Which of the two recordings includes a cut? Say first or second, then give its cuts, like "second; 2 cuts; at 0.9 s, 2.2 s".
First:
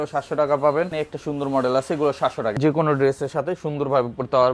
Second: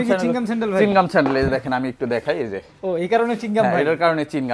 first; 2 cuts; at 0.9 s, 2.6 s